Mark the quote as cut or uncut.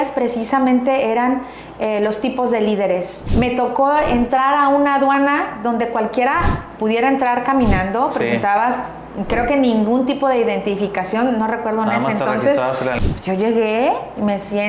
cut